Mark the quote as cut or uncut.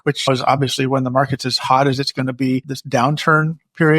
cut